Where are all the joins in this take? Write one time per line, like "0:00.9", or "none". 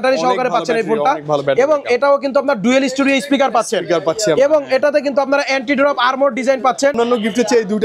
0:06.9

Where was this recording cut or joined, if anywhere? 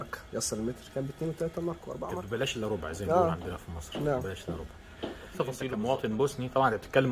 0:02.2
0:05.4

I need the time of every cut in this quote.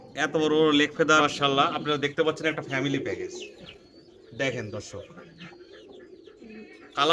0:01.3

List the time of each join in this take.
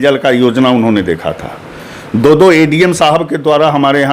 none

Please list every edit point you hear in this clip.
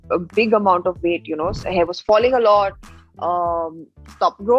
0:01.6

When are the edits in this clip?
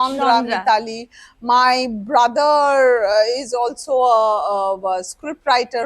none

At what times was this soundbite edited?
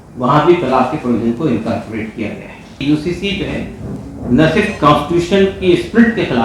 0:02.8

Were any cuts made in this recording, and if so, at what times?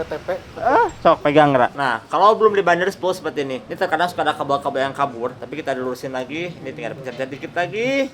0:01.7
0:03.6
0:05.4

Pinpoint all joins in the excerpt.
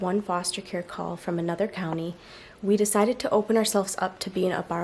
none

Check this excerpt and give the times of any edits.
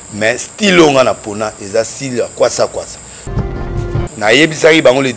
0:03.5

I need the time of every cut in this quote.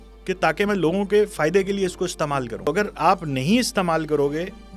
0:02.7

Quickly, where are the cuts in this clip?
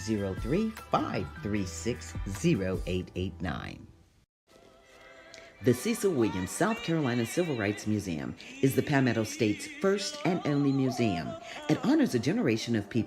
0:04.7

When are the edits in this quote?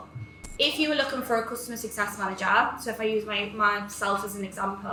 none

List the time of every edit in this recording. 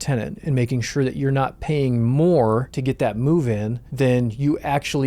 0:02.7
0:03.8

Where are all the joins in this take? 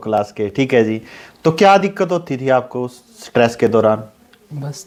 none

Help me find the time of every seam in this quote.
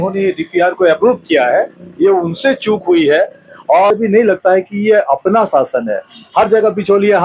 0:03.9

